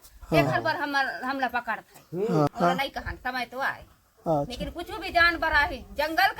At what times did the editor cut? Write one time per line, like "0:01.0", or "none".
0:02.5